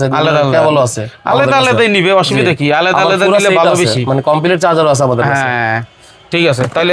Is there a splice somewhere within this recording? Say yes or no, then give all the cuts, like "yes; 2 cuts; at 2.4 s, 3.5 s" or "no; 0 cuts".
no; 0 cuts